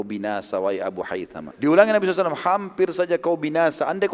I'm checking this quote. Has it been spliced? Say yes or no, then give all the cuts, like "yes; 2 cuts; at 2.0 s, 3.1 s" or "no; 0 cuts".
yes; 1 cut; at 1.4 s